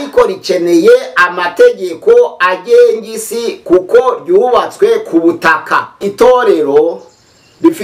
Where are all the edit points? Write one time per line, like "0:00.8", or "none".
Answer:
0:06.0

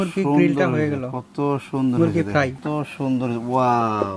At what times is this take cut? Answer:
0:02.6

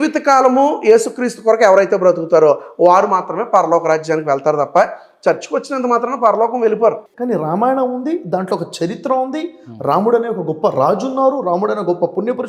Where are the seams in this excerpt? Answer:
0:07.1

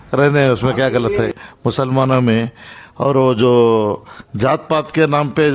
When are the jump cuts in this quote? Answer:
0:01.4

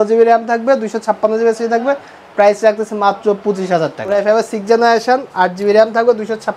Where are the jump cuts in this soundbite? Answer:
0:04.1

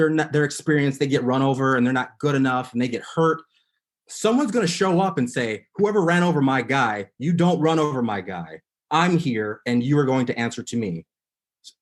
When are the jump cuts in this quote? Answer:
none

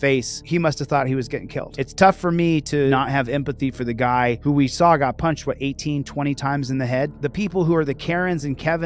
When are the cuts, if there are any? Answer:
0:01.7
0:02.9
0:07.1

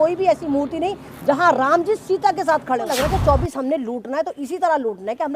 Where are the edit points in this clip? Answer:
0:02.9

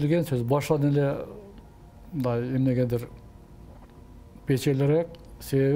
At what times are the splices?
none

